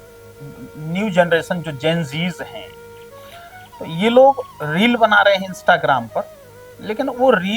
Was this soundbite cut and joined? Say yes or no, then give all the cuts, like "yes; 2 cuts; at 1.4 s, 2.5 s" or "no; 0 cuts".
no; 0 cuts